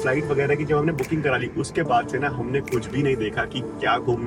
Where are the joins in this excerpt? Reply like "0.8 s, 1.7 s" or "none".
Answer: none